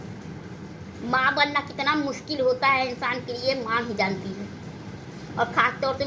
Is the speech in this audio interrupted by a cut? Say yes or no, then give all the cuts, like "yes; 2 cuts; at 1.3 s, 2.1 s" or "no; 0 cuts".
no; 0 cuts